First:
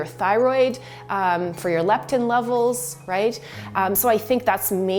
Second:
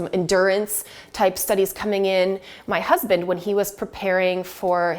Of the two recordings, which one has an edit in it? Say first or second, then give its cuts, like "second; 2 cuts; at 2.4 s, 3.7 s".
second; 1 cut; at 2.5 s